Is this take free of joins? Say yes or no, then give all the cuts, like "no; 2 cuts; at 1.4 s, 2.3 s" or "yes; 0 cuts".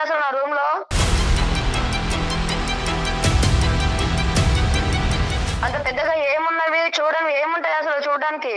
no; 1 cut; at 0.9 s